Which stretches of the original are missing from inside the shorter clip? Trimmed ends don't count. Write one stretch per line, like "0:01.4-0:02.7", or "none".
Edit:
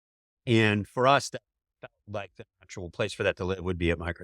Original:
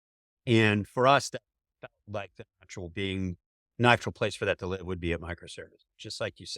0:02.9-0:04.2